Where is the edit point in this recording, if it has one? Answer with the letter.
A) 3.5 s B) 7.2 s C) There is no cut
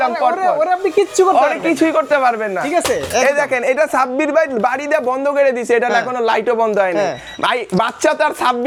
C